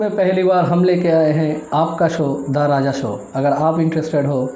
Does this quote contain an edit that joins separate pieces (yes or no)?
no